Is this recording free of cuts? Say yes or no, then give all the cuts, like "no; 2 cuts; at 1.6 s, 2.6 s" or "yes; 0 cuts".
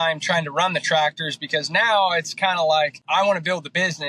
no; 1 cut; at 3.0 s